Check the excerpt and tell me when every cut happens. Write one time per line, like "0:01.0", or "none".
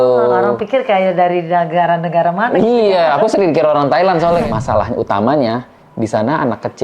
0:04.4